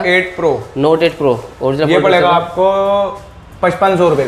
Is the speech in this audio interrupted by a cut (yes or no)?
no